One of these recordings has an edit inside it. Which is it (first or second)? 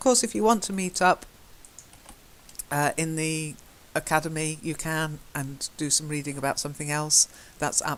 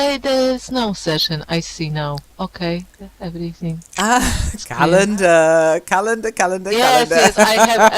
second